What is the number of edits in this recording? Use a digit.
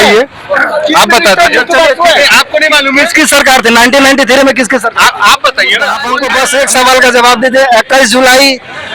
1